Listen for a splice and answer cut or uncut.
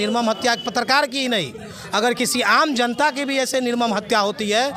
uncut